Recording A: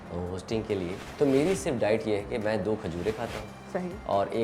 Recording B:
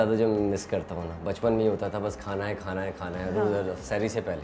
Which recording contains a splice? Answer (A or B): A